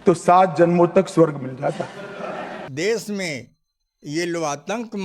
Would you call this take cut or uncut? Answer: cut